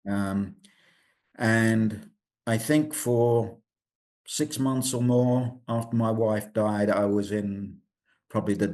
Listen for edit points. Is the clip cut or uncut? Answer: uncut